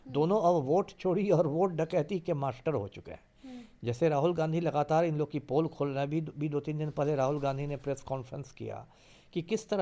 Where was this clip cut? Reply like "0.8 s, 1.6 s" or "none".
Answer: none